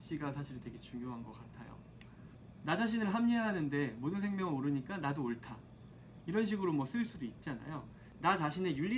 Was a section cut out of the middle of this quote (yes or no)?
no